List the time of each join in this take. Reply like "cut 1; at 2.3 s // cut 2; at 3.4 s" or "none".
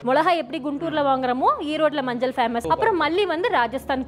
cut 1; at 2.6 s

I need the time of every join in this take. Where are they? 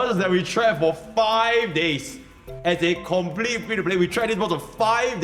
none

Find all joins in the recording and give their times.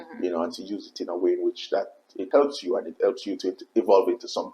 cut 1; at 2.3 s

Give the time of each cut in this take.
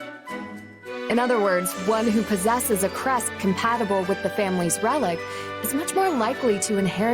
cut 1; at 1.1 s

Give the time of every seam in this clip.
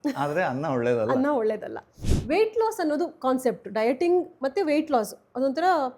cut 1; at 2.1 s

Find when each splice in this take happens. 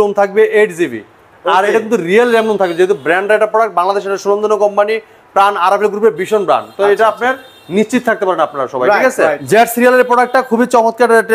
cut 1; at 9.4 s

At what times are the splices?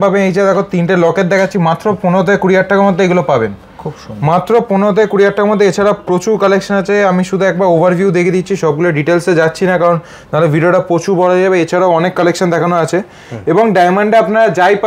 none

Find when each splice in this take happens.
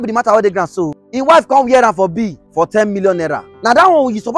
cut 1; at 1.0 s // cut 2; at 2.4 s // cut 3; at 3.5 s

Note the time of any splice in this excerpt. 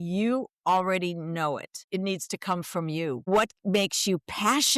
cut 1; at 1.7 s // cut 2; at 3.2 s

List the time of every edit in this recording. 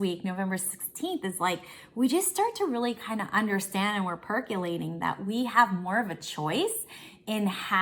none

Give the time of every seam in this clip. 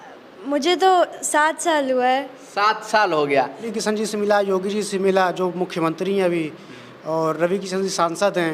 cut 1; at 3.7 s

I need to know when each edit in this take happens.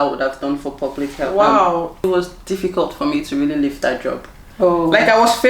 cut 1; at 2.1 s

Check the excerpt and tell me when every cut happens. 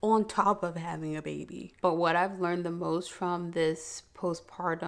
cut 1; at 1.8 s

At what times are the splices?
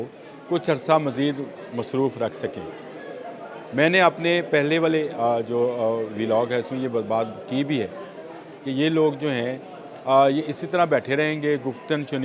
none

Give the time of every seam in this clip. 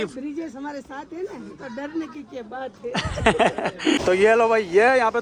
cut 1; at 4.0 s

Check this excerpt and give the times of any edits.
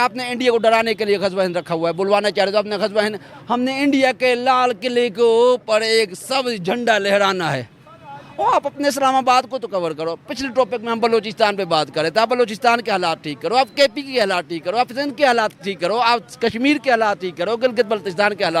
none

